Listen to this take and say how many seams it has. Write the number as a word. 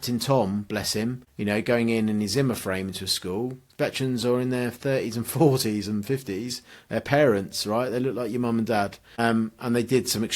two